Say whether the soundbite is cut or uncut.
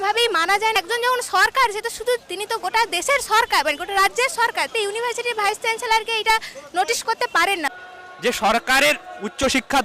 cut